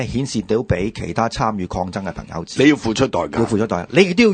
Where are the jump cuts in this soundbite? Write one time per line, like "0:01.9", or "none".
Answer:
none